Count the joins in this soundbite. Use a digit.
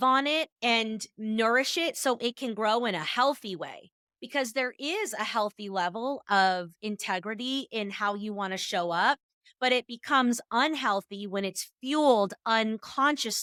0